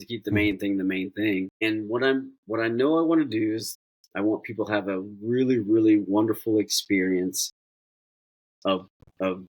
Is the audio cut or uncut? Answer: cut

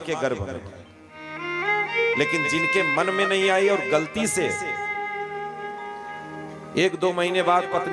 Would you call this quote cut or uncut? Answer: uncut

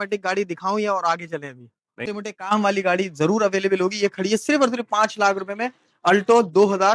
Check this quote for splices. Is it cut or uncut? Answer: cut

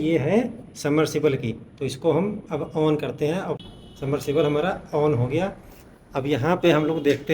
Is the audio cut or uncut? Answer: cut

